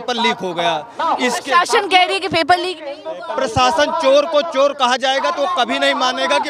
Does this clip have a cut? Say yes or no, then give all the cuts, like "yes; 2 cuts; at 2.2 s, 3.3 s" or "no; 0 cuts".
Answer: no; 0 cuts